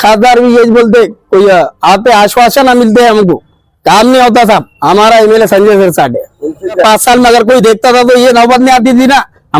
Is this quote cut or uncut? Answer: cut